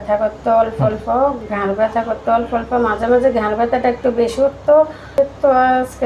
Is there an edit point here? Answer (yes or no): yes